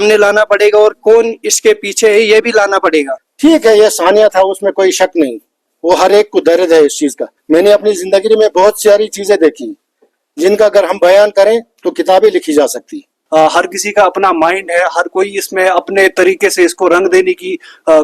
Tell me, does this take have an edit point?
yes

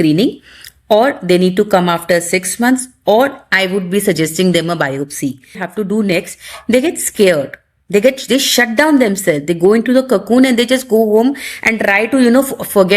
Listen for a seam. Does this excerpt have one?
yes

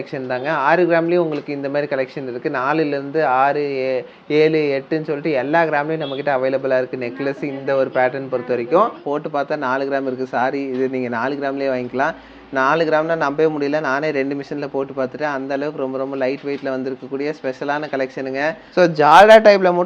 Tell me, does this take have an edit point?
yes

